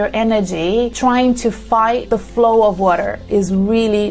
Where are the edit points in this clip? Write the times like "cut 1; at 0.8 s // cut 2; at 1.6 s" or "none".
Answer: cut 1; at 0.9 s // cut 2; at 2.0 s